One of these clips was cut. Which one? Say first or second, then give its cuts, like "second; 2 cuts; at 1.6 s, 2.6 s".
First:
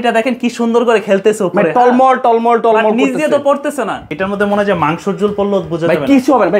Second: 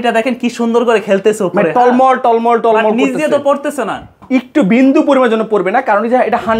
first; 1 cut; at 4.1 s